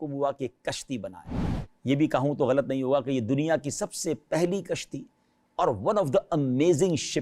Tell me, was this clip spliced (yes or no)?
no